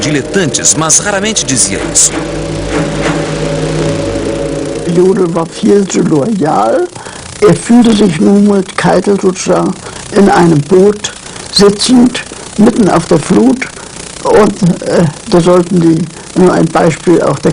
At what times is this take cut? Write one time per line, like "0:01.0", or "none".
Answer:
none